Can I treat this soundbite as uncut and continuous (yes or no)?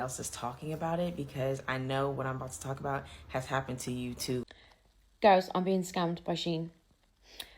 no